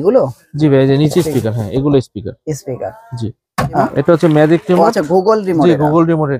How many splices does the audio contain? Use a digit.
1